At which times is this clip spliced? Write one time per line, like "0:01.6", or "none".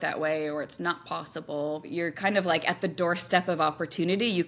0:01.9